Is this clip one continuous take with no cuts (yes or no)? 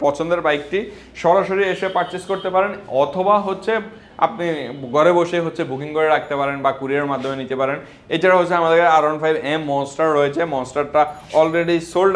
yes